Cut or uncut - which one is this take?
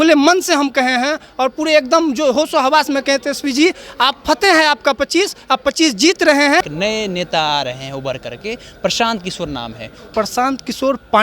cut